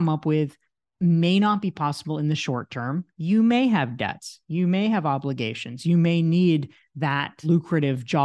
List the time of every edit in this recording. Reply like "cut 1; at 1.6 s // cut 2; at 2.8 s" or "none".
cut 1; at 7.3 s